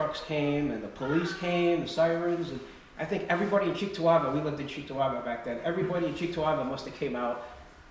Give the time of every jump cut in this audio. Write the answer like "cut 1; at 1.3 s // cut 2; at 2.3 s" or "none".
none